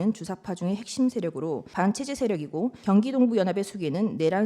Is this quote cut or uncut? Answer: cut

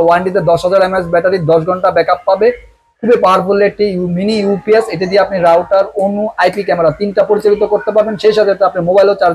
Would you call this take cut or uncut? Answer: uncut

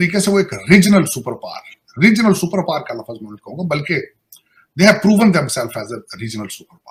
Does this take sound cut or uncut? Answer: uncut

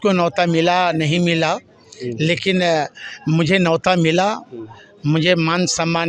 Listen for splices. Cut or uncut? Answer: uncut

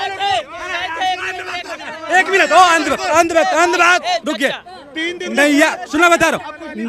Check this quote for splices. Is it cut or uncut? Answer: uncut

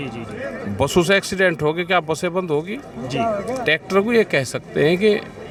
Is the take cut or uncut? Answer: uncut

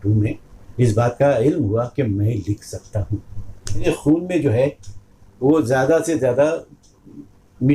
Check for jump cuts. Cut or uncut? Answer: cut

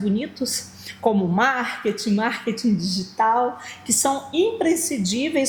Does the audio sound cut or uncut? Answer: uncut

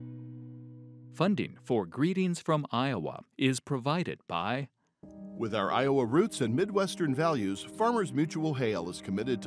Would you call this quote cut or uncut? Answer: cut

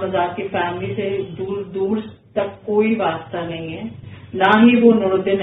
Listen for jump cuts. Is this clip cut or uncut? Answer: uncut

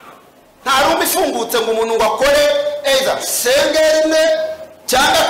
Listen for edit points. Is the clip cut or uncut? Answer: uncut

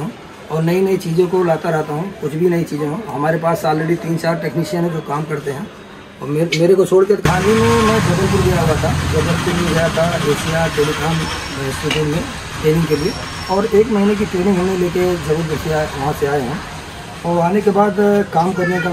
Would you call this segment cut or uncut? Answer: cut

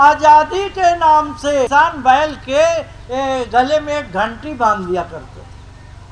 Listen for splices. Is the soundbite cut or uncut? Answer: cut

